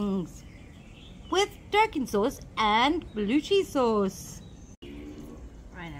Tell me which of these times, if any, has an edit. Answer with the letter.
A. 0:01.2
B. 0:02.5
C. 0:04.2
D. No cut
D